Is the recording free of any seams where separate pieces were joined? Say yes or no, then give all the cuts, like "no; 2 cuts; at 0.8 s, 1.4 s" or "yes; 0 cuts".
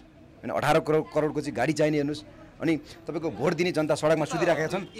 yes; 0 cuts